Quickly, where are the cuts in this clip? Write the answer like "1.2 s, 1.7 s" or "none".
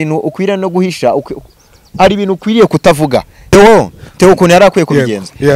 3.5 s